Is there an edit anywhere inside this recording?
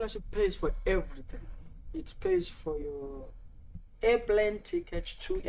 no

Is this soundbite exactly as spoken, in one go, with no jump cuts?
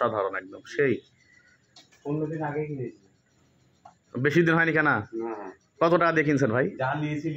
yes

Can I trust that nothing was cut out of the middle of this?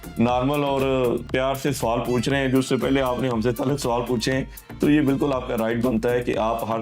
no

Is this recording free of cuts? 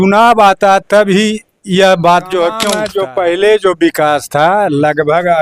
no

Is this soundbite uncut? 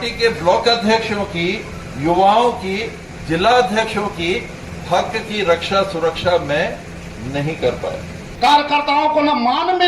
no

